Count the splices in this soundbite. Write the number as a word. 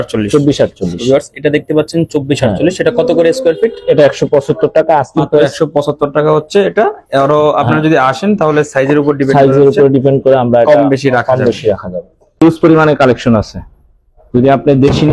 one